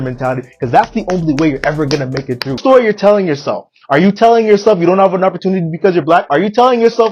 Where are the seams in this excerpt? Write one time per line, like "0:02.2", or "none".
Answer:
0:02.6